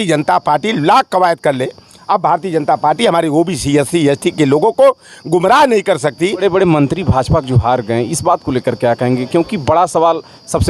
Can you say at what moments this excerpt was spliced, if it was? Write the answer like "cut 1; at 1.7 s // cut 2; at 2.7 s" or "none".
cut 1; at 6.4 s